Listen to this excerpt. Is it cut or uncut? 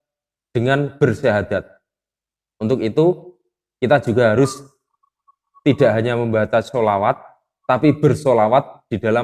uncut